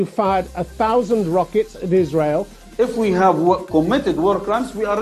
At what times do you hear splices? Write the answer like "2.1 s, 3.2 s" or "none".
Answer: 2.6 s